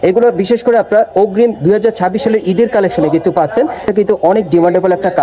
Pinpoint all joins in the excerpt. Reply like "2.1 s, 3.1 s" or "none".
3.9 s